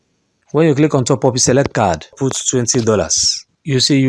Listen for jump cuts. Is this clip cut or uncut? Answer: cut